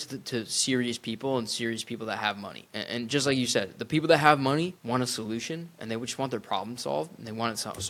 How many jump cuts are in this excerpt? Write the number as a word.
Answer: two